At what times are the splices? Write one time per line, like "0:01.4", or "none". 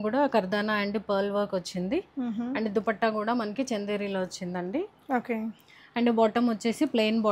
none